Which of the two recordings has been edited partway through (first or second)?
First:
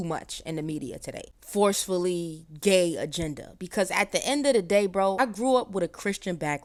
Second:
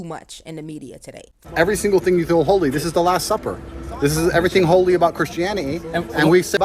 second